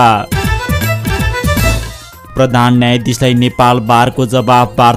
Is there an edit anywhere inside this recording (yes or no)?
no